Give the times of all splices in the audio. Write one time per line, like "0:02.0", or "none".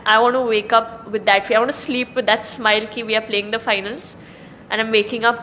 none